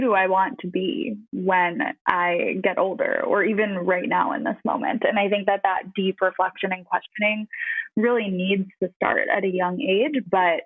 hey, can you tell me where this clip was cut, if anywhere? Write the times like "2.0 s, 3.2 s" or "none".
1.2 s, 2.0 s